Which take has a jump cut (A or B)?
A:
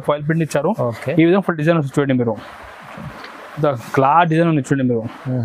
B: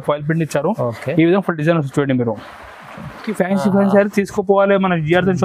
B